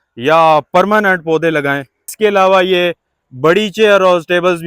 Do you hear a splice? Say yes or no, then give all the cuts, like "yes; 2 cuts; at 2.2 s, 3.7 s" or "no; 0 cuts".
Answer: yes; 1 cut; at 2.1 s